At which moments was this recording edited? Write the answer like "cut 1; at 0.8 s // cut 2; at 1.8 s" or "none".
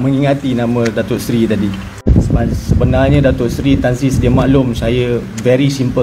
cut 1; at 2.0 s